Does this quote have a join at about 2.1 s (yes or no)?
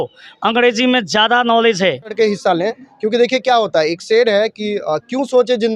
yes